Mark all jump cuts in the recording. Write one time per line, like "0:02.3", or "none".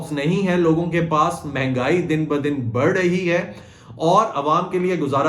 none